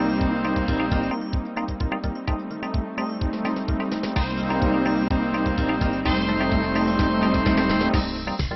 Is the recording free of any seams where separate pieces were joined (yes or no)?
yes